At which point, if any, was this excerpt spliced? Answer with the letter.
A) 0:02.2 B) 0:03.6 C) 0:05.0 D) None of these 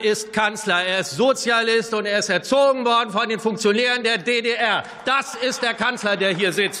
D